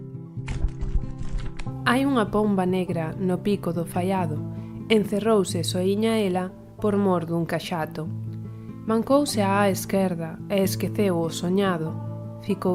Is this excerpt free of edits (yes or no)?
yes